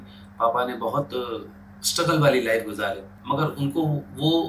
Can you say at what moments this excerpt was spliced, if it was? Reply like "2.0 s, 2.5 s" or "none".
3.1 s